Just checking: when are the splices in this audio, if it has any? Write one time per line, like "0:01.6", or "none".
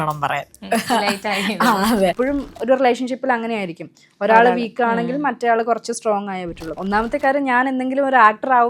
0:02.2
0:06.8